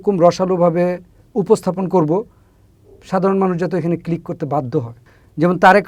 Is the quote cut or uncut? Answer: uncut